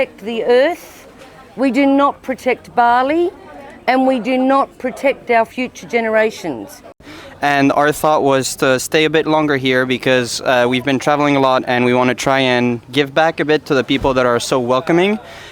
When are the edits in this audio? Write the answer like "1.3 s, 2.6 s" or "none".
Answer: 7.1 s